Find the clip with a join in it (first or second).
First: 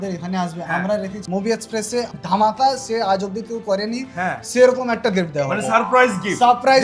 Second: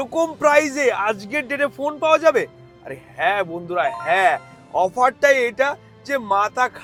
first